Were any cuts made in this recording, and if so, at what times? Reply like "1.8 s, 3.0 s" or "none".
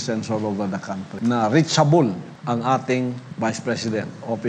1.1 s, 2.3 s, 3.3 s